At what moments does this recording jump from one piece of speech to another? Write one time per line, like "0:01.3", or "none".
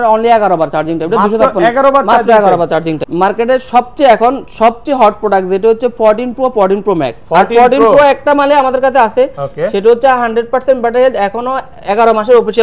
0:03.1